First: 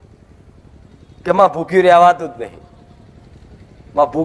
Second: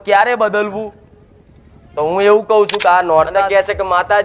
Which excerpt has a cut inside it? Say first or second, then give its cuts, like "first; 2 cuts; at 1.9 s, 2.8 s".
second; 1 cut; at 3.3 s